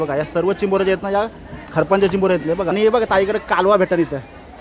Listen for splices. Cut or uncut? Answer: cut